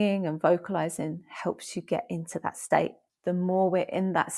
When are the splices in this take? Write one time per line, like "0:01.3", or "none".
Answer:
0:03.1